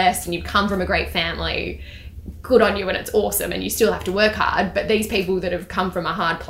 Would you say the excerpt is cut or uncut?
uncut